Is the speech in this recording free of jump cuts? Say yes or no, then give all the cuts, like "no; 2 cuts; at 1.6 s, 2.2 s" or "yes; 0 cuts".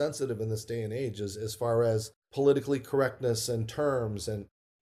no; 1 cut; at 2.2 s